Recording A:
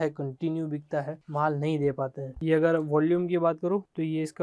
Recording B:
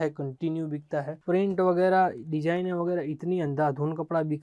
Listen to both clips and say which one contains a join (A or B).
B